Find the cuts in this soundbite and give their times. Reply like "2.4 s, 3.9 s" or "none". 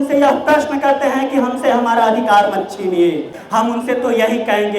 3.4 s